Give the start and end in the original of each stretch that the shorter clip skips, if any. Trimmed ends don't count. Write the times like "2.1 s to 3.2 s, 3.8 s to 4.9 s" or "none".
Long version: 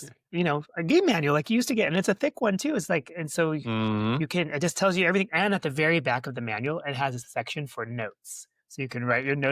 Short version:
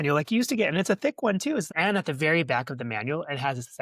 2.9 s to 5.2 s